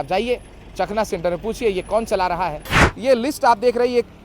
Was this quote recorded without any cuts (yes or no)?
no